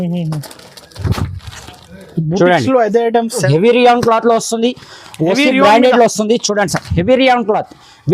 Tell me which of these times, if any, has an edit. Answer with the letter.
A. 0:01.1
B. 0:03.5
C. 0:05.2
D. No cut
B